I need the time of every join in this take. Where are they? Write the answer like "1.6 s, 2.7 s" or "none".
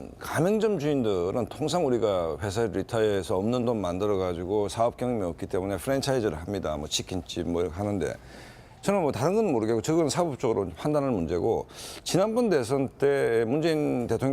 6.6 s